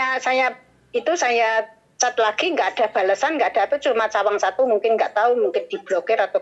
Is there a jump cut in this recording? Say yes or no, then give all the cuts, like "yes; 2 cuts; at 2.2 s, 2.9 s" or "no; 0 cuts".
no; 0 cuts